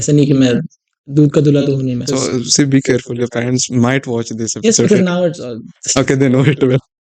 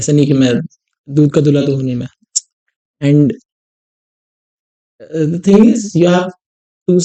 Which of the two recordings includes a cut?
first; 1 cut; at 2.1 s

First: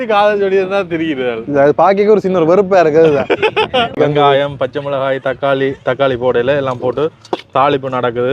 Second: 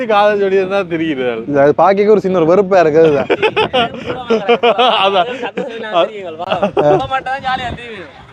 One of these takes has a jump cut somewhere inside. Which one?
first; 1 cut; at 4.0 s

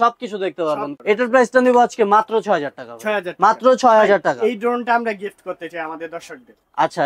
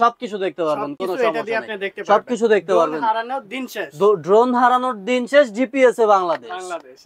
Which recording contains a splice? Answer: first; 1 cut; at 0.9 s

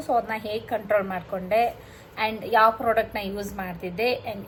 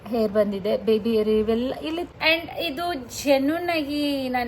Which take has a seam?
second; 1 cut; at 2.1 s

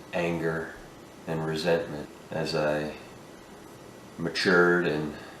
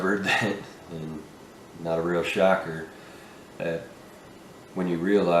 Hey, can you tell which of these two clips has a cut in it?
first; 1 cut; at 2.1 s

